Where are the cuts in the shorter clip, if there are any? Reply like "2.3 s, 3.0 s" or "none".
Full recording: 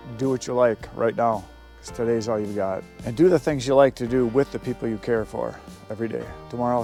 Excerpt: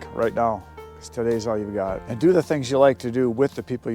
2.1 s